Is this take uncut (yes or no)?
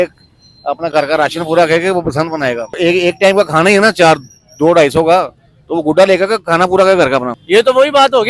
no